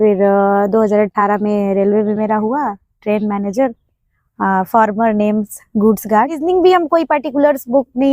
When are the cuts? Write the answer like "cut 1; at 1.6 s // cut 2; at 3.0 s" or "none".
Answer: cut 1; at 6.4 s

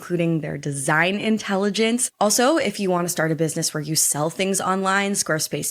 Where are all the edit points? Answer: cut 1; at 2.1 s

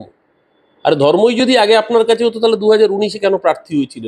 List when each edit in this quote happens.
none

